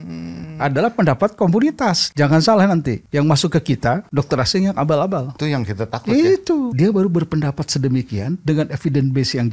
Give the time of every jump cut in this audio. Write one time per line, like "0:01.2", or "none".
0:02.0
0:03.0
0:04.1
0:05.3
0:06.7